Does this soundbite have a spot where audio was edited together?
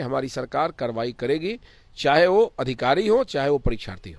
no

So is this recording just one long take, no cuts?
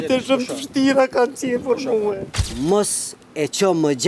no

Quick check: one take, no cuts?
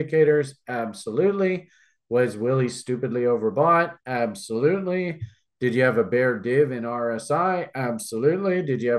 yes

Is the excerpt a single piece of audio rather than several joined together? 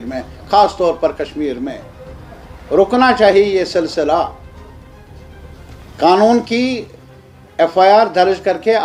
yes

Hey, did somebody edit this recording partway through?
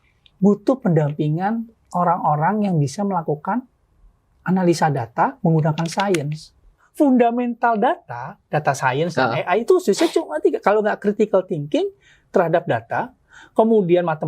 yes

